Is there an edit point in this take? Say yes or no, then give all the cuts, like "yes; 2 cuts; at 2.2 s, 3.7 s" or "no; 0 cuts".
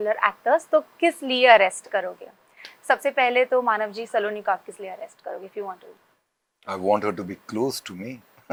no; 0 cuts